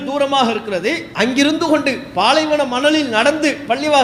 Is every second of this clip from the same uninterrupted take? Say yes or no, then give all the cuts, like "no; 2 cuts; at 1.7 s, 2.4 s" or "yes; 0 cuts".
no; 1 cut; at 1.1 s